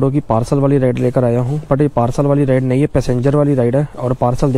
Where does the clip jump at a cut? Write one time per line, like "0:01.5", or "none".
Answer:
none